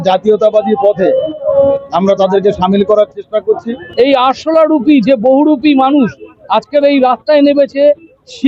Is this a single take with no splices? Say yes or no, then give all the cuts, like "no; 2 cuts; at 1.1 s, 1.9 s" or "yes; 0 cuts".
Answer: no; 1 cut; at 3.8 s